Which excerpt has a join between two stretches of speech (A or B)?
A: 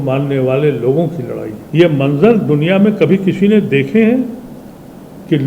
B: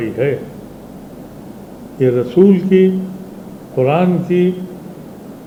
A